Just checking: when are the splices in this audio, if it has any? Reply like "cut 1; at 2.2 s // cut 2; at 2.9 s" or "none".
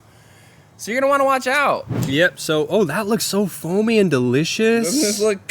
cut 1; at 1.9 s